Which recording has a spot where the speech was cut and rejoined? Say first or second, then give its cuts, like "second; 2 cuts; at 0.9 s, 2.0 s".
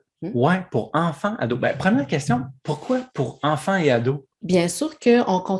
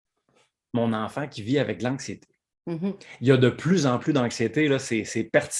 first; 1 cut; at 4.4 s